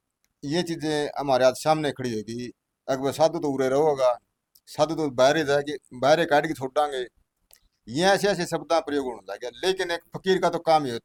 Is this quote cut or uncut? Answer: uncut